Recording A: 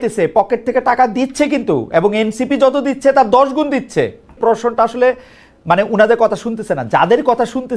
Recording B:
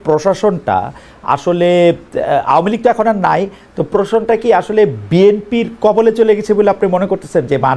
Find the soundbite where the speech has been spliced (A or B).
A